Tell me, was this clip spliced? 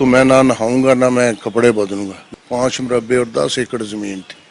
yes; 1 cut; at 2.2 s

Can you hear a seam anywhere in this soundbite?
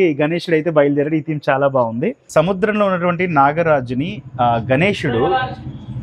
yes; 1 cut; at 2.2 s

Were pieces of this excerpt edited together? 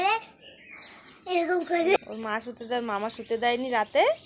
yes; 1 cut; at 2.0 s

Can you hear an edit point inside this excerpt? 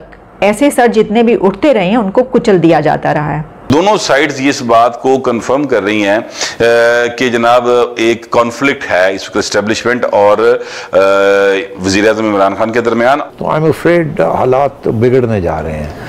yes; 2 cuts; at 3.7 s, 13.2 s

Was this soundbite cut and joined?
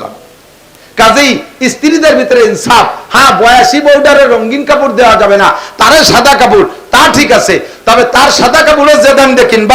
no; 0 cuts

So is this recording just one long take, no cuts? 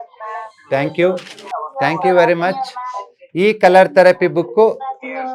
no; 1 cut; at 1.4 s

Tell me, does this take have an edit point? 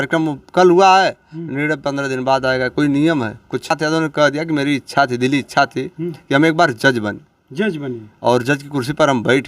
yes; 1 cut; at 3.7 s

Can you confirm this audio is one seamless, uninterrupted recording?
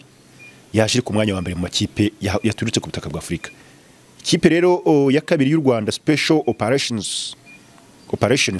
yes; 0 cuts

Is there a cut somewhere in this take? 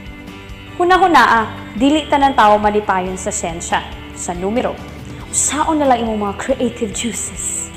no; 0 cuts

